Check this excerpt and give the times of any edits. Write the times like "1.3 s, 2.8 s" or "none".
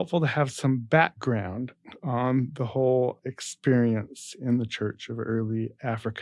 none

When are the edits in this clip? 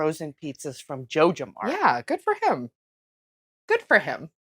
none

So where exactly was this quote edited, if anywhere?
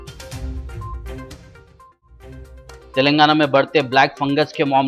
none

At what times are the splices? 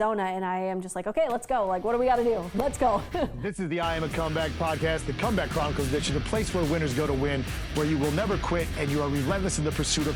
3.4 s

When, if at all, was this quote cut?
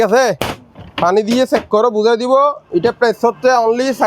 none

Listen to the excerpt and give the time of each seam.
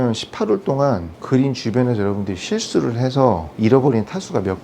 1.1 s, 3.5 s

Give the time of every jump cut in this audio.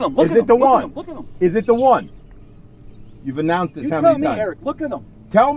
none

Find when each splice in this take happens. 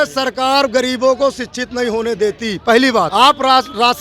3.1 s

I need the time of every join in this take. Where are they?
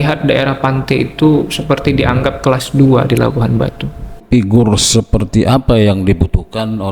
4.2 s

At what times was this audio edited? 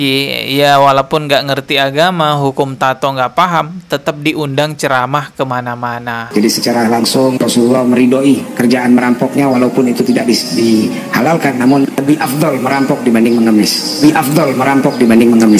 6.2 s

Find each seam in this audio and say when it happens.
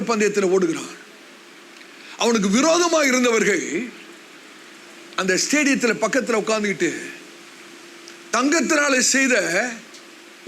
none

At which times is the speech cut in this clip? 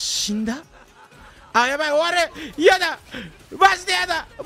none

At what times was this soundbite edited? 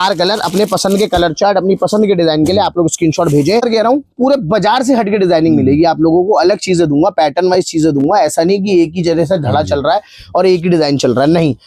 3.7 s

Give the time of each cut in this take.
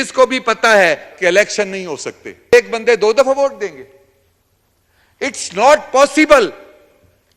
2.5 s

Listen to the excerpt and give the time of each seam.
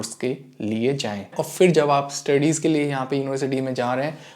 1.3 s

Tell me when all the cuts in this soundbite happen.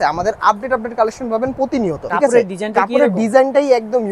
2.0 s

